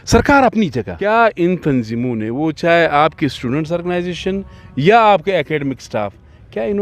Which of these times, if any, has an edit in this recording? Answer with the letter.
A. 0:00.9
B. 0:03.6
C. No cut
A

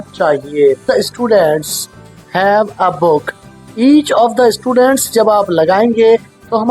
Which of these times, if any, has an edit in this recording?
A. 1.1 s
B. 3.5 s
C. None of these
A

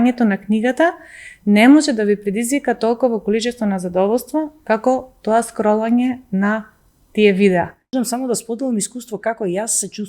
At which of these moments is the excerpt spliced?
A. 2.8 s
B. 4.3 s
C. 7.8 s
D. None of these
C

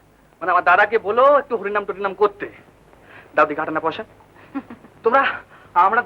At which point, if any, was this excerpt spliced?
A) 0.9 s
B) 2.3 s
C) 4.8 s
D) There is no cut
C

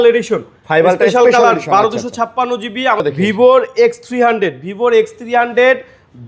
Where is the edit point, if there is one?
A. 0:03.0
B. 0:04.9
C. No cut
A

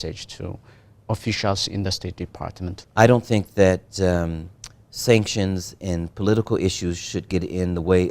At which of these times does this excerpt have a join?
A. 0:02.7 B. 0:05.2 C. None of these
A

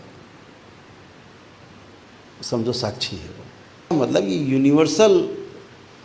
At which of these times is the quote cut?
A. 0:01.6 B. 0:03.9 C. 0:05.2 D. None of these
B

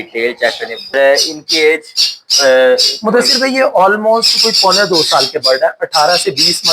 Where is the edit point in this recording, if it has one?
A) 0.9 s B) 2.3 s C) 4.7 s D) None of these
A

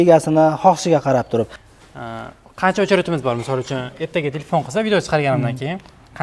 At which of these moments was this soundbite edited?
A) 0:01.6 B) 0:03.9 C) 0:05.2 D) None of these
A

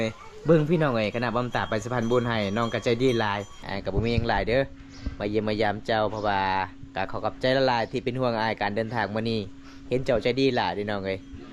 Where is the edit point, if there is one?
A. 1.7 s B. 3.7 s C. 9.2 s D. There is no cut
B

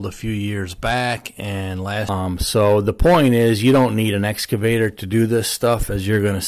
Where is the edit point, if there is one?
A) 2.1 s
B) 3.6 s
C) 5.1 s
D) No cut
A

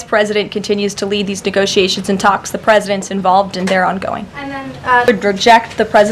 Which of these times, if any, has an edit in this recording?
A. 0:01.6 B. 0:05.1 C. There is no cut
B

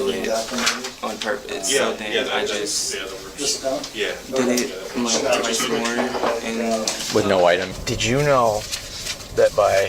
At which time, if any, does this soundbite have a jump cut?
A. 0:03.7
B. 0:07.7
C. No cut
B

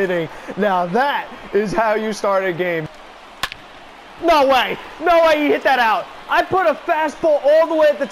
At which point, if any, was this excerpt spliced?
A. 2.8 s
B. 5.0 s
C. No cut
A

